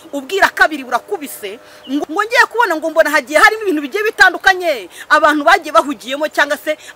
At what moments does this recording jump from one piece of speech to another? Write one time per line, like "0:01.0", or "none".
0:02.0